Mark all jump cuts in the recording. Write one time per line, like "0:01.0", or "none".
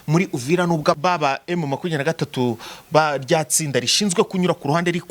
0:00.9

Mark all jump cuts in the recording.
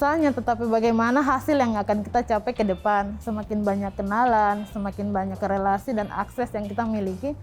0:03.2

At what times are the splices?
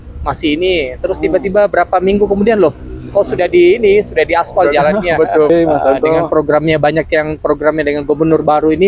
0:05.5

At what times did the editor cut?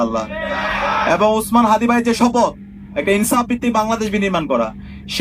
none

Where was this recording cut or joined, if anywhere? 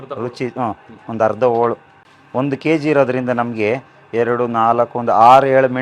none

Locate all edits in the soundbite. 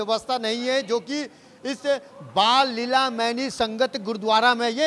none

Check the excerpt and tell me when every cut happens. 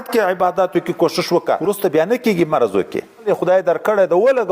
0:01.6
0:03.2

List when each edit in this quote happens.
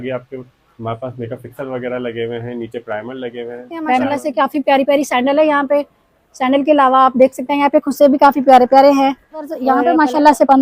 0:04.1
0:09.6

